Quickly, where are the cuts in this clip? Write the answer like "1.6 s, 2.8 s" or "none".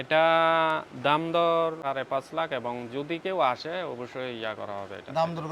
1.8 s